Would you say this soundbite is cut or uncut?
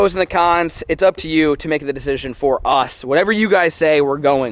uncut